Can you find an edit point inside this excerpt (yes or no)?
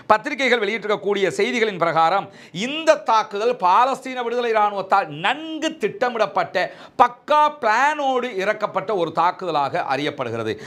no